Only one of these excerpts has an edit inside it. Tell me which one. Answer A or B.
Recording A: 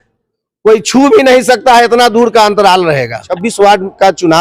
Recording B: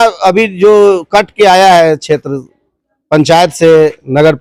A